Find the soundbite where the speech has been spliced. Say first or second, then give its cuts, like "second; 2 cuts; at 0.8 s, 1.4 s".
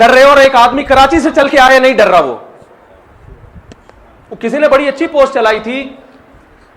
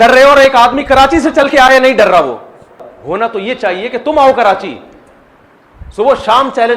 second; 1 cut; at 2.9 s